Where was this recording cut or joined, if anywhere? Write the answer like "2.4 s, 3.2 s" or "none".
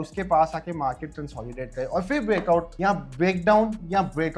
none